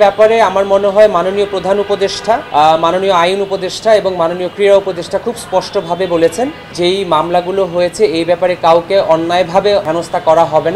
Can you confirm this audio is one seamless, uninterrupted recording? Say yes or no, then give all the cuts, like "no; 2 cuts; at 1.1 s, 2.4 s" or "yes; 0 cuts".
no; 3 cuts; at 2.4 s, 6.7 s, 9.9 s